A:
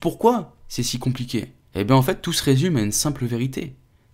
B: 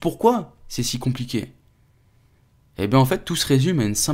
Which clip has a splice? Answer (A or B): A